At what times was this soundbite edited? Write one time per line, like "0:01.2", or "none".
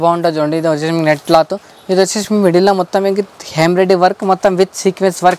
none